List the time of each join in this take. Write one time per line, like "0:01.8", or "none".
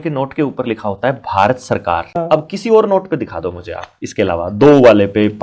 0:02.2